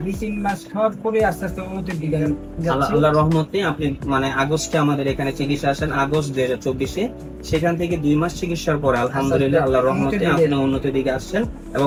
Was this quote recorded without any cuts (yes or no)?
yes